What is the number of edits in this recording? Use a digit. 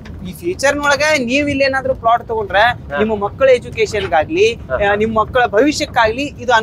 0